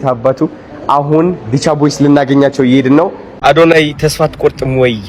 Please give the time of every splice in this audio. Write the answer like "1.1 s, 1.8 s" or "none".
3.2 s